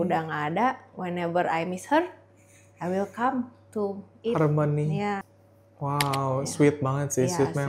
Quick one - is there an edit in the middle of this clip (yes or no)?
yes